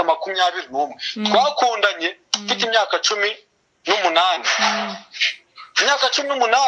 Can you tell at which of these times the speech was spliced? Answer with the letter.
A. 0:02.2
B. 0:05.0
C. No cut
C